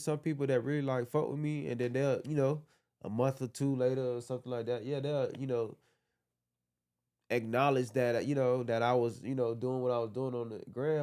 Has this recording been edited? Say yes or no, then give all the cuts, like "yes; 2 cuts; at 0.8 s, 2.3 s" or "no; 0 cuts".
no; 0 cuts